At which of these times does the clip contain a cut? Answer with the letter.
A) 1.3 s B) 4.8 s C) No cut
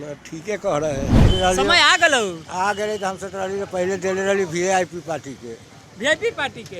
A